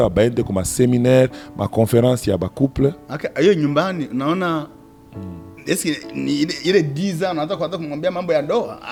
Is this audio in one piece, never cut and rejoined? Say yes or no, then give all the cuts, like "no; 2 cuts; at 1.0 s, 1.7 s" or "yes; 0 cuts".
yes; 0 cuts